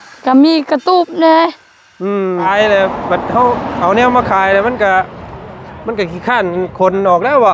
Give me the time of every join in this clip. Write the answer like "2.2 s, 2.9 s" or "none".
2.4 s